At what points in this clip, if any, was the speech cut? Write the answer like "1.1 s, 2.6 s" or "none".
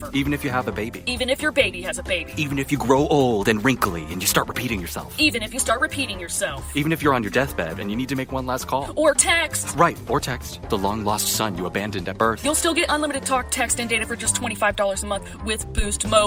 none